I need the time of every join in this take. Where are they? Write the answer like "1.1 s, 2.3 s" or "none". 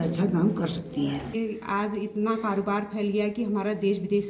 1.3 s